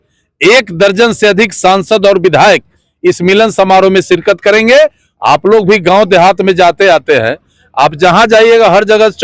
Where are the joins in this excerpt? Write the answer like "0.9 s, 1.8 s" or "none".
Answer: 5.1 s